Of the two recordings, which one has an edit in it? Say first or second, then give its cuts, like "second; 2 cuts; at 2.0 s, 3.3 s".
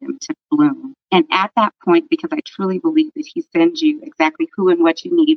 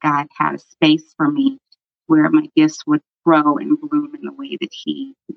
first; 1 cut; at 0.9 s